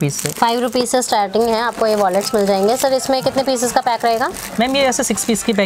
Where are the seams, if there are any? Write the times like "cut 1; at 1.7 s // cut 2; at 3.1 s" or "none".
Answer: none